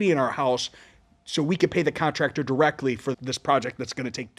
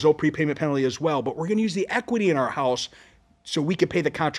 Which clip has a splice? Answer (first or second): first